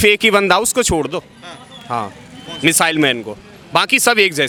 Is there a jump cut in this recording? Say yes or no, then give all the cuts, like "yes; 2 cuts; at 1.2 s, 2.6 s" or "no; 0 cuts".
no; 0 cuts